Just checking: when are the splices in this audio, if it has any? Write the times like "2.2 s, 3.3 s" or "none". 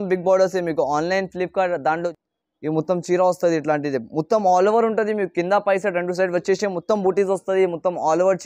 2.0 s